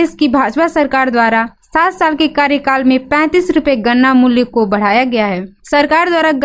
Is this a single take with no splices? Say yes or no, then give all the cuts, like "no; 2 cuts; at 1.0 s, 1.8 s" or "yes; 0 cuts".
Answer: yes; 0 cuts